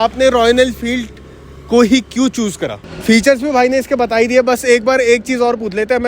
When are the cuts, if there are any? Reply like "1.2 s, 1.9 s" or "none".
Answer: 2.9 s

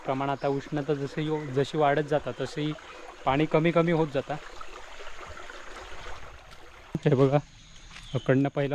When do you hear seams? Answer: 7.0 s

